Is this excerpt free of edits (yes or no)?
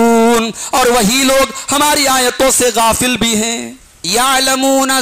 no